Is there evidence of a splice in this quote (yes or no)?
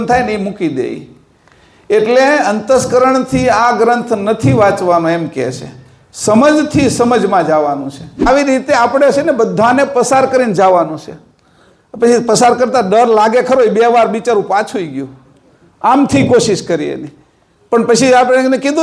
yes